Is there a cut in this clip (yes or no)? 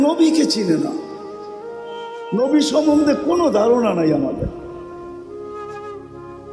no